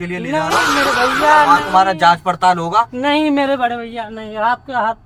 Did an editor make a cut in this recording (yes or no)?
no